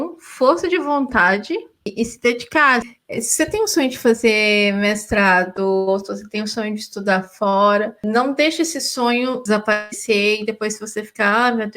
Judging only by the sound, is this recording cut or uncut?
cut